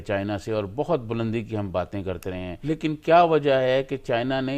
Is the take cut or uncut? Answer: cut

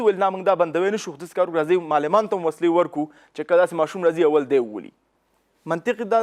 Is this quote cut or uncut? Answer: uncut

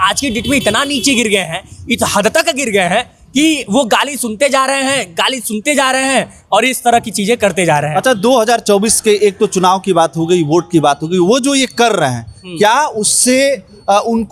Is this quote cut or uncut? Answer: uncut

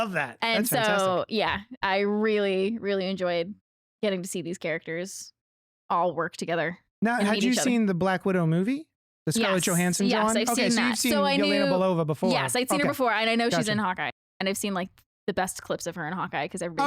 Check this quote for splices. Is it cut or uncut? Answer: cut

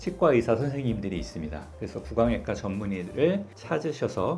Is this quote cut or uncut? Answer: uncut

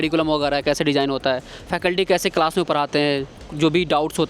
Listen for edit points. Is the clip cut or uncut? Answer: uncut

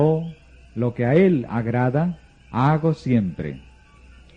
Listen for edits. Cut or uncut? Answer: uncut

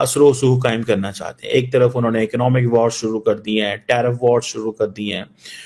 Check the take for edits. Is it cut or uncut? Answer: uncut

